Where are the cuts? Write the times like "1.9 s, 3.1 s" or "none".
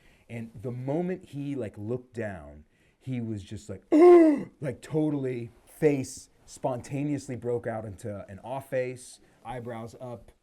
9.3 s